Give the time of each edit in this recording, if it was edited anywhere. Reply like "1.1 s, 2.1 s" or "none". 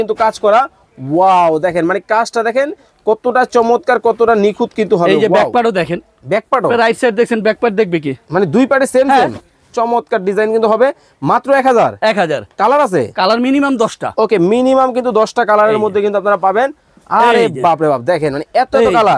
none